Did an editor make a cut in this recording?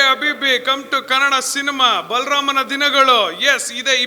no; 0 cuts

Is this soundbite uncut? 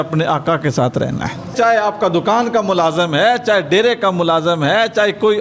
no; 1 cut; at 1.5 s

